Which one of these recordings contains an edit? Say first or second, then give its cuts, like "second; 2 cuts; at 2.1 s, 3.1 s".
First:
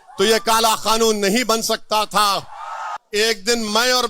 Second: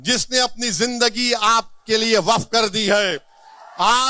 first; 1 cut; at 2.9 s